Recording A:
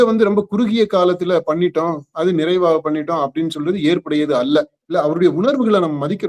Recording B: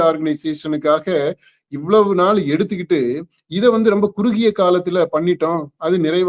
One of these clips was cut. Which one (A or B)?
A